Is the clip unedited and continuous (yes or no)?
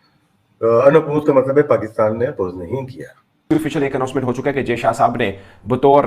no